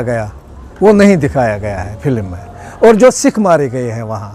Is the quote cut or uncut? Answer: uncut